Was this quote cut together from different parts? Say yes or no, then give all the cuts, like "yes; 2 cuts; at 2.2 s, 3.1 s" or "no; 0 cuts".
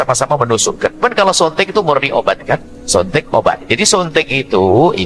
yes; 2 cuts; at 1.0 s, 3.6 s